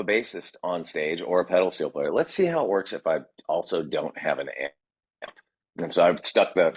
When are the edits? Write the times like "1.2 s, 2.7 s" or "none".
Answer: none